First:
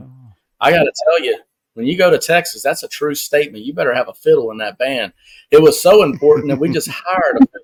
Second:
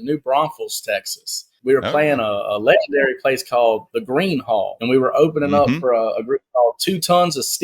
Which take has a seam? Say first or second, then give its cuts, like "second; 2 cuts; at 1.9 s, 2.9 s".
second; 2 cuts; at 1.5 s, 4.8 s